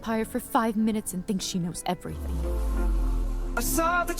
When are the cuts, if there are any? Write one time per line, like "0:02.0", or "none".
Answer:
0:02.3